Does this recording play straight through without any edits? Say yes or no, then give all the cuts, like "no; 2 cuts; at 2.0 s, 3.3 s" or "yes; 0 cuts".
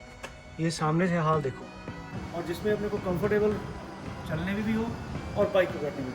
no; 1 cut; at 2.2 s